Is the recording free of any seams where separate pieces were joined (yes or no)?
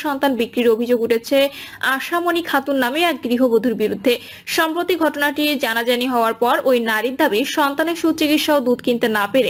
yes